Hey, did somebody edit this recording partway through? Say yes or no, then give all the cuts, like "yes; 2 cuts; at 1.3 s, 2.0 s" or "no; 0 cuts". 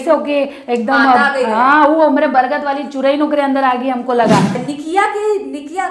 yes; 1 cut; at 4.5 s